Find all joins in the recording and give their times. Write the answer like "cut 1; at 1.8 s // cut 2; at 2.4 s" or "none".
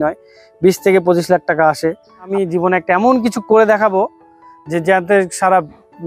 cut 1; at 2.3 s